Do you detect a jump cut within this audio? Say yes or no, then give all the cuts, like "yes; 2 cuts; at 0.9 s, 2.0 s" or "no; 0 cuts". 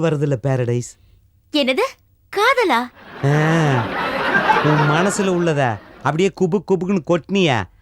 no; 0 cuts